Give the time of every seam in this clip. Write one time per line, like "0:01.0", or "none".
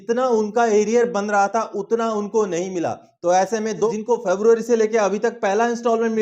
0:03.9